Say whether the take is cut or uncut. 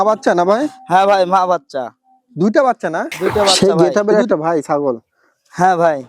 cut